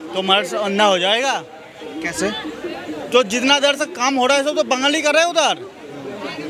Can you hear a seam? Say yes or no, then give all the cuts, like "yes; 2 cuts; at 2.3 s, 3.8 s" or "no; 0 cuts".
no; 0 cuts